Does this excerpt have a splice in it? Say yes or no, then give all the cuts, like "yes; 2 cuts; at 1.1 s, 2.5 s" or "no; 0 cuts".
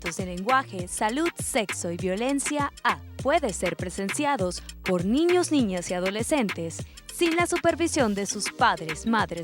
yes; 1 cut; at 3.1 s